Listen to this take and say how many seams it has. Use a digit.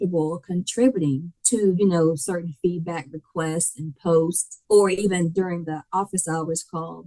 2